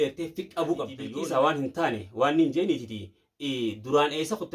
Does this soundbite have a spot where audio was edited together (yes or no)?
yes